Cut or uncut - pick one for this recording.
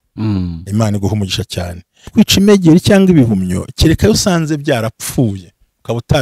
cut